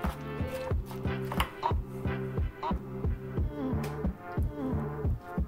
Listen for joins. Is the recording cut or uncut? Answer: uncut